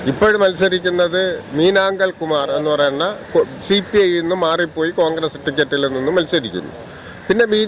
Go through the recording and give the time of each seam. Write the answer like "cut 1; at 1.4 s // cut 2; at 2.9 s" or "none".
none